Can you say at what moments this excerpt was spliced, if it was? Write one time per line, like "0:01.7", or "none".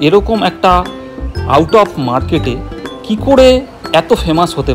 none